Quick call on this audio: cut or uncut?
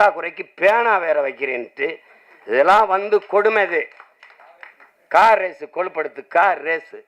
uncut